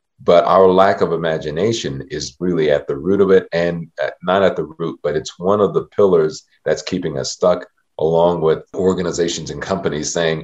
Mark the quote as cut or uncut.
cut